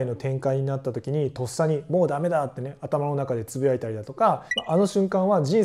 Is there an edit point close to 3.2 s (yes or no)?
no